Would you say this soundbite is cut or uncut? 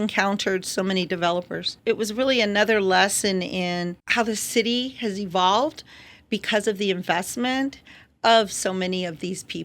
cut